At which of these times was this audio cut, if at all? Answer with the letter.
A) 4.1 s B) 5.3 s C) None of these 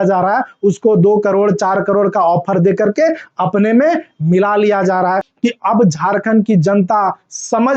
B